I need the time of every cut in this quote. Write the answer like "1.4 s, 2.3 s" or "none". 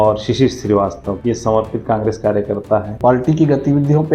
2.9 s